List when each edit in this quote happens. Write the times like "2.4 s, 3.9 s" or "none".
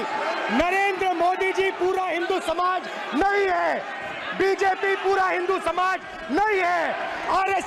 none